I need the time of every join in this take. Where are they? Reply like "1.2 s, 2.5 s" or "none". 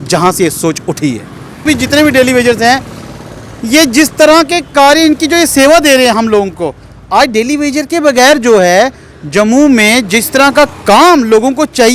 1.7 s

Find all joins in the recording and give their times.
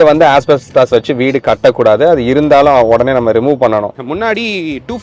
3.9 s

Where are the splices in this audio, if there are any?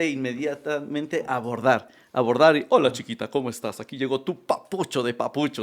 none

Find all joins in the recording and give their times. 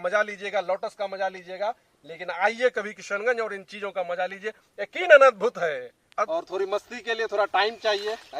6.3 s

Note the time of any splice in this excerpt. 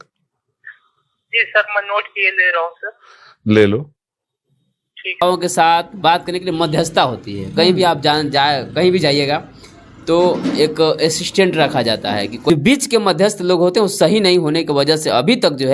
5.2 s, 12.5 s

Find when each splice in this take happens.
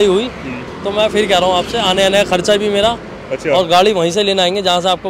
none

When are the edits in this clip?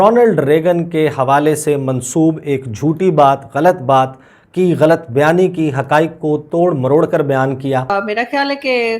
8.0 s

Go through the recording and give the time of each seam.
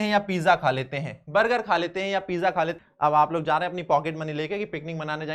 2.8 s

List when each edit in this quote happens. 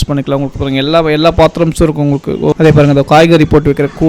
2.6 s

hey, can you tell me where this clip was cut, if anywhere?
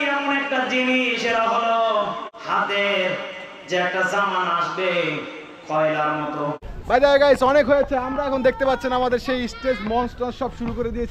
2.3 s, 6.7 s

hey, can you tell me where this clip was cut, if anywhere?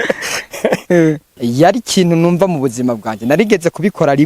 1.3 s

